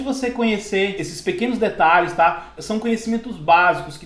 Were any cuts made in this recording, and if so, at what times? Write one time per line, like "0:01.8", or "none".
0:01.1
0:02.5